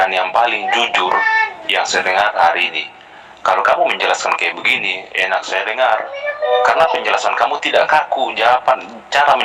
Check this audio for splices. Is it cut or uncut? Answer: uncut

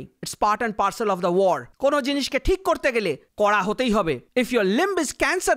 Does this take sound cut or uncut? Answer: uncut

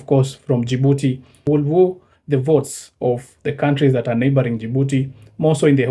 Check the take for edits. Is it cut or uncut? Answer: uncut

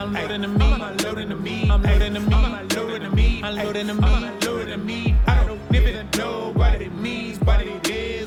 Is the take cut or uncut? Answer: uncut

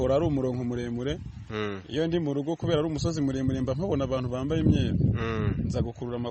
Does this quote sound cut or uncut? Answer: uncut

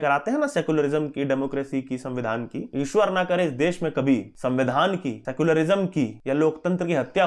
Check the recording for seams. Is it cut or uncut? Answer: cut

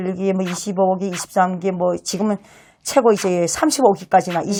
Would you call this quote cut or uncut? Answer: uncut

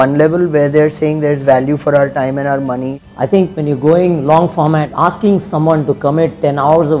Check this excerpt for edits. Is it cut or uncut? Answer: cut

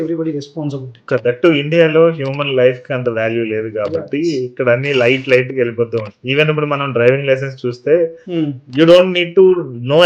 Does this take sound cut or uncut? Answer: cut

